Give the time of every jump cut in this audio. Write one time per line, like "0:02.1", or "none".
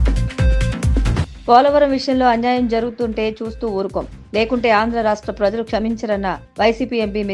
0:01.0